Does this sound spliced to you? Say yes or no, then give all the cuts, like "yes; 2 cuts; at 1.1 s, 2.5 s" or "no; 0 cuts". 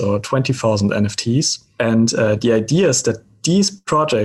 yes; 2 cuts; at 1.6 s, 3.3 s